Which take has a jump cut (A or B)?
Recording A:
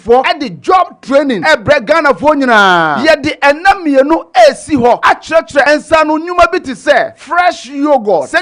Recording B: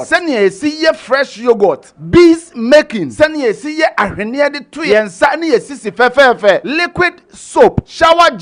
A